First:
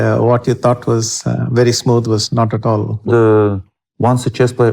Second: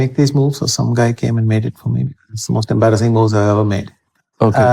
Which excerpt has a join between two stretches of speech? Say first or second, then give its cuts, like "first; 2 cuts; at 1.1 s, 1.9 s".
first; 1 cut; at 3.1 s